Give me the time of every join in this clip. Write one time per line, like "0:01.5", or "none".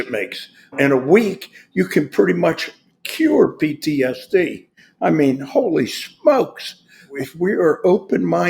0:00.8
0:07.0